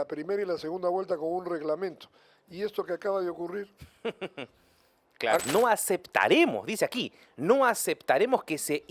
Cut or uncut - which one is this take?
cut